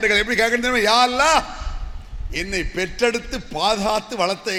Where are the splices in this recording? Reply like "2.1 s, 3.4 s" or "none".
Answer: none